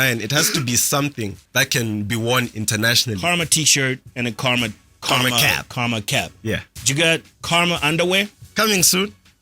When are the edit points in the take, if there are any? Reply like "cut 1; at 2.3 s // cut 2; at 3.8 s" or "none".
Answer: cut 1; at 1.4 s // cut 2; at 3.2 s // cut 3; at 4.1 s // cut 4; at 4.9 s // cut 5; at 7.3 s // cut 6; at 8.4 s